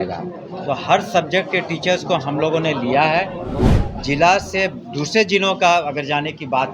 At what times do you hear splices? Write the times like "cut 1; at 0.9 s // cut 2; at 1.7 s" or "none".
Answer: cut 1; at 3.7 s